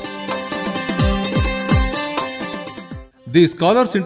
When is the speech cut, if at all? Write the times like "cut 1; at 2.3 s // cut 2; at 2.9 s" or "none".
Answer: cut 1; at 3.1 s